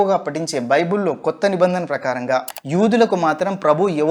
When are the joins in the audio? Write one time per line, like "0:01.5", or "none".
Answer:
0:02.5